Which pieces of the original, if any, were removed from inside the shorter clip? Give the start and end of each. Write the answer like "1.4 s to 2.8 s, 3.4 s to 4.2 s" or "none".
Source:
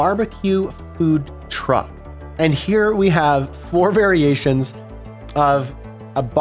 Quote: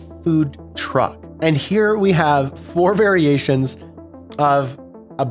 2.0 s to 2.2 s